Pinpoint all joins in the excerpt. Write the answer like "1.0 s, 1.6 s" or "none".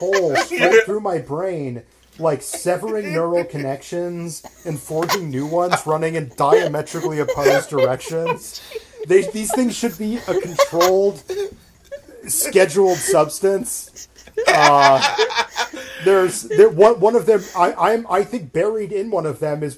none

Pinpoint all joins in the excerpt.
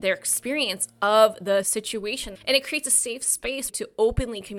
1.7 s, 3.7 s

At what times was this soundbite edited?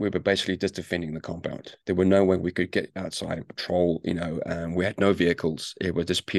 none

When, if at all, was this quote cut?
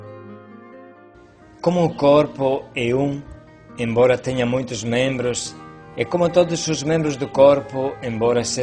1.1 s

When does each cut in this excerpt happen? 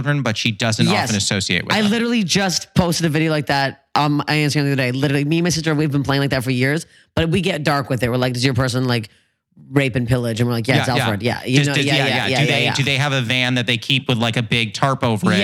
none

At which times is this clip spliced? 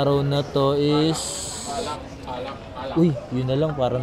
none

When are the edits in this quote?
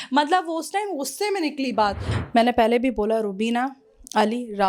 2.1 s

